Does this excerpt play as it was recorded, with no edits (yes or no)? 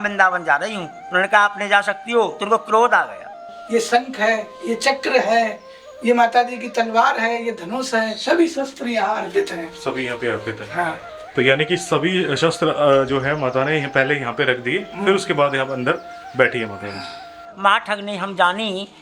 no